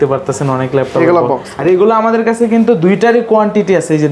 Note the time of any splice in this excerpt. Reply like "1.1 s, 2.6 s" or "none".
1.5 s